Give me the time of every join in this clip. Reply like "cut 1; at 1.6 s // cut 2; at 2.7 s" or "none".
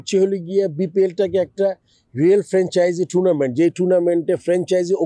none